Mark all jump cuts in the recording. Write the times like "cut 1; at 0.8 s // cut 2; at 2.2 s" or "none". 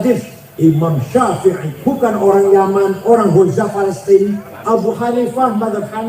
cut 1; at 1.7 s // cut 2; at 4.5 s